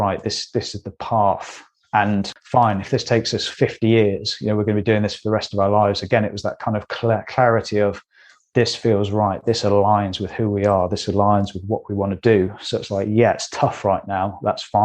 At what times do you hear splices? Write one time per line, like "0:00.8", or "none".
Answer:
0:02.4